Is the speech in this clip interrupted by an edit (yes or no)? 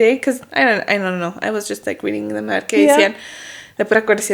no